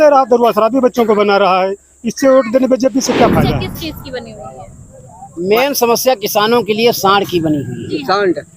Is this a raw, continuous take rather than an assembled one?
no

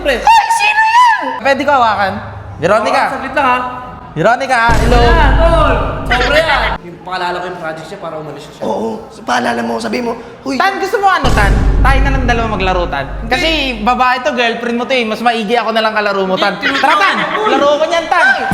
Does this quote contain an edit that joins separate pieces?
yes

